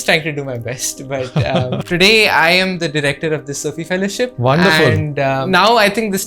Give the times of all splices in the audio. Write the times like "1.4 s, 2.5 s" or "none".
1.8 s, 4.3 s, 5.4 s